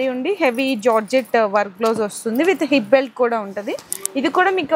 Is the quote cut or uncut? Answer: uncut